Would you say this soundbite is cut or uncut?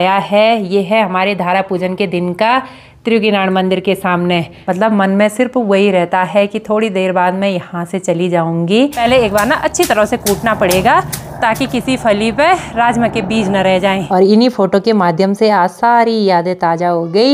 cut